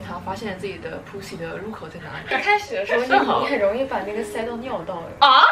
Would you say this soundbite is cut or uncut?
uncut